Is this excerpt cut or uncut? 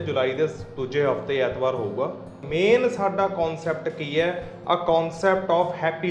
cut